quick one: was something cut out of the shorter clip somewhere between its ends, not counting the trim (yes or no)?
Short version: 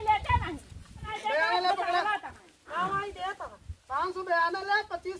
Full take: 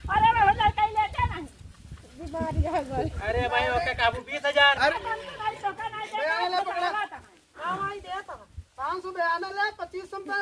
yes